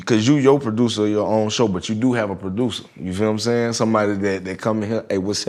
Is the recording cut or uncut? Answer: uncut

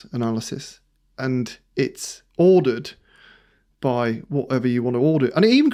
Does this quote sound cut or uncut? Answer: uncut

